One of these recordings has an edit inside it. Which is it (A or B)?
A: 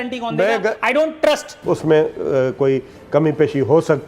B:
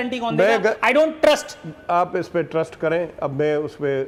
A